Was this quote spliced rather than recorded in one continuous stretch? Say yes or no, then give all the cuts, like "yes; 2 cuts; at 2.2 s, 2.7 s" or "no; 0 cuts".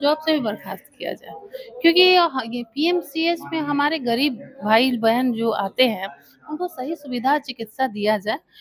no; 0 cuts